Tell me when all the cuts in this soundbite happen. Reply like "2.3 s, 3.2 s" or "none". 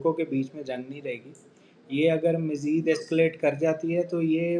none